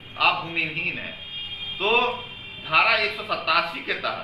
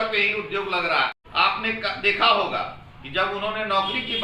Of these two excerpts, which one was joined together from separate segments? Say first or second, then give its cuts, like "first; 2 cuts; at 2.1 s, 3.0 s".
second; 1 cut; at 1.2 s